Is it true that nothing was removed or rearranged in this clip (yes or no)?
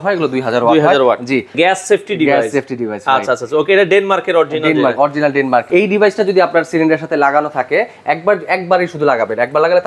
no